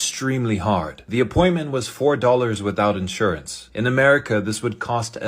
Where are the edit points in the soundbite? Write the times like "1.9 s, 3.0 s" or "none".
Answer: 1.0 s